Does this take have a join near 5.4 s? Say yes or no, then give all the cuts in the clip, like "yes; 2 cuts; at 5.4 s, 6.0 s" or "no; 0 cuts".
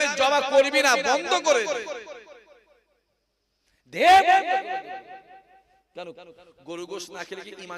no; 0 cuts